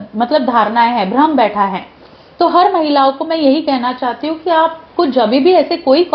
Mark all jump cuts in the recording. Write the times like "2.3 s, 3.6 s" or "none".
none